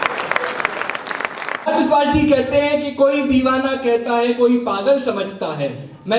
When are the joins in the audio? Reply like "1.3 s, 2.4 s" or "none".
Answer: 1.7 s